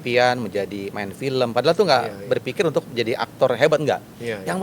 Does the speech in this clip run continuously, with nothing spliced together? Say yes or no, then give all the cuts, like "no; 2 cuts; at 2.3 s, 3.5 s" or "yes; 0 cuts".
yes; 0 cuts